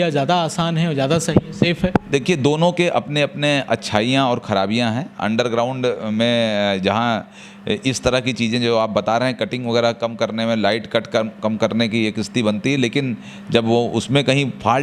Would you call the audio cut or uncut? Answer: uncut